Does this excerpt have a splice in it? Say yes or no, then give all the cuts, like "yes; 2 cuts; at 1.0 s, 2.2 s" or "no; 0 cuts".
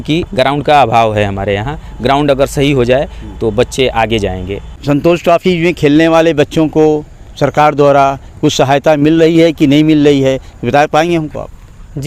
yes; 1 cut; at 4.7 s